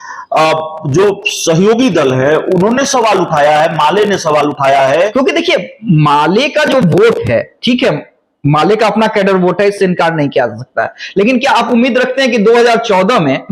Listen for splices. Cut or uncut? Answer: cut